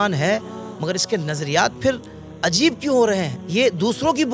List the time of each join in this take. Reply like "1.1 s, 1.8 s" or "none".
3.4 s